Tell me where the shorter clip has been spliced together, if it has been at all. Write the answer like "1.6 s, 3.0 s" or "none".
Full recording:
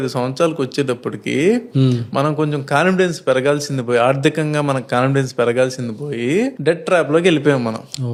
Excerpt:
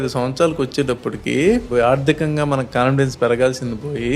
1.7 s

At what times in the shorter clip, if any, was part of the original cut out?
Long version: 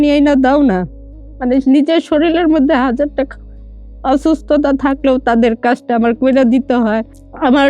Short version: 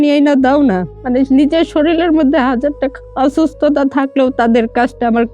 0.9 s, 3.0 s

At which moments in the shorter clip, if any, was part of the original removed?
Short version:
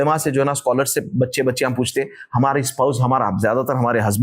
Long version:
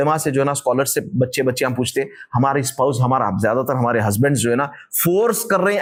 none

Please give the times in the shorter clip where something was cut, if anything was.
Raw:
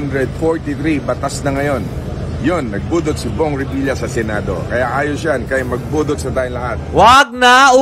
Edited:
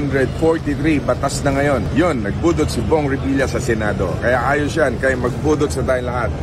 1.9 s

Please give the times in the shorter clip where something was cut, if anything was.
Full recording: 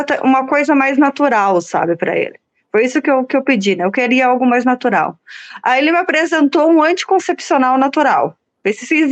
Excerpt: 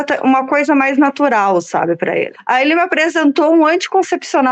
2.4 s

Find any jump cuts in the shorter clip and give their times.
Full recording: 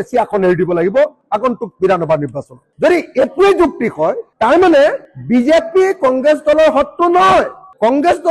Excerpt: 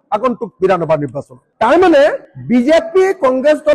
1.4 s

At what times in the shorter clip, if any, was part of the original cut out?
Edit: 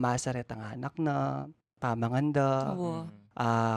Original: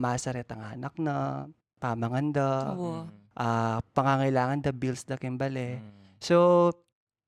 none

